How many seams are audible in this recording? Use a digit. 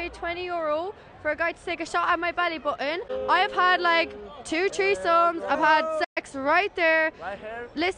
1